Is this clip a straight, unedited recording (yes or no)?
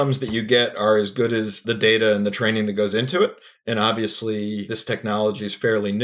no